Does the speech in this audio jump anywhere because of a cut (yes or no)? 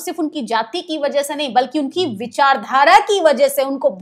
no